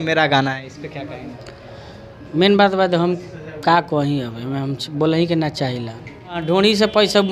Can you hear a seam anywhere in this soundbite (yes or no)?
yes